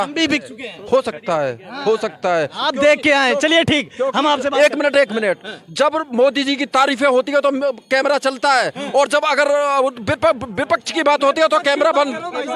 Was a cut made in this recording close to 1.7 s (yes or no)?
no